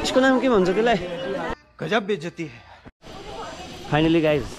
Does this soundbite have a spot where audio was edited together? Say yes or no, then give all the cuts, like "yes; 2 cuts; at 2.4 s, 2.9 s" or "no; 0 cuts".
yes; 2 cuts; at 1.5 s, 3.0 s